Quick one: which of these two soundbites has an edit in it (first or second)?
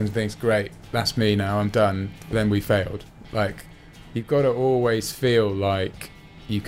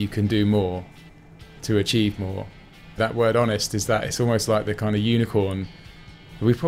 second